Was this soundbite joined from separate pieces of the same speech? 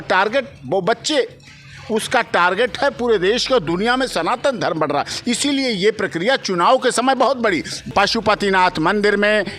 yes; 1 cut; at 7.8 s

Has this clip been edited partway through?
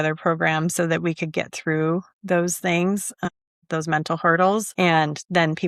no; 0 cuts

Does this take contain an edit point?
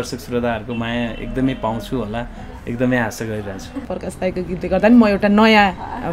yes; 1 cut; at 3.9 s

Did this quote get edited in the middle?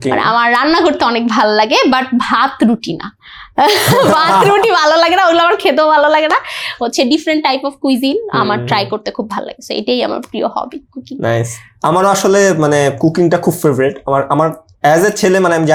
no; 0 cuts

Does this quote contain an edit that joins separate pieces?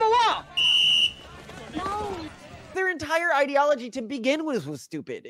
yes; 1 cut; at 2.3 s

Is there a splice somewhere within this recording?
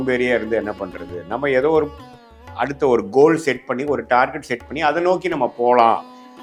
no; 0 cuts

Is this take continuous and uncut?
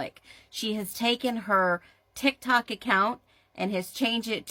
yes; 0 cuts

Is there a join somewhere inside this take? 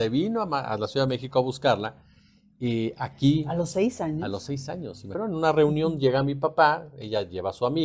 yes; 1 cut; at 5.0 s

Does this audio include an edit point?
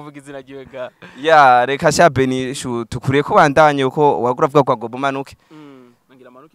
no; 0 cuts

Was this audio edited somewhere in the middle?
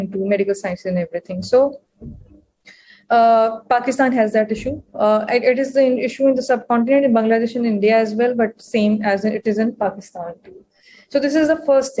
no; 0 cuts

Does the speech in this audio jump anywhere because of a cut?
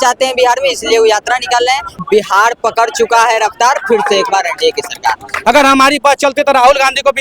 yes; 2 cuts; at 2.0 s, 5.3 s

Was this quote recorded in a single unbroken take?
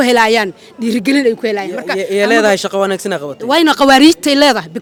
yes; 0 cuts

